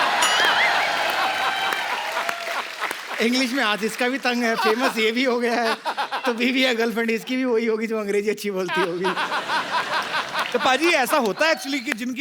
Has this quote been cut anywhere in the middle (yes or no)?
no